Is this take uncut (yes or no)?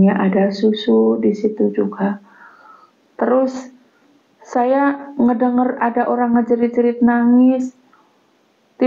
yes